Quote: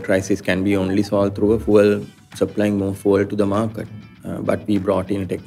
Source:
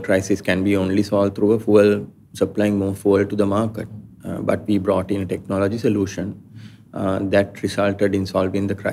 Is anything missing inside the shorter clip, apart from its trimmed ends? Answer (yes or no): no